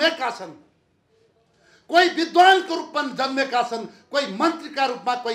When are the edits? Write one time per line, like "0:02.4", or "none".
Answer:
none